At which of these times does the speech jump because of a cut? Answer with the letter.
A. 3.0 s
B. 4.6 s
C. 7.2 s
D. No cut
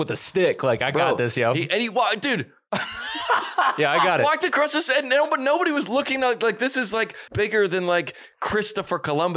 C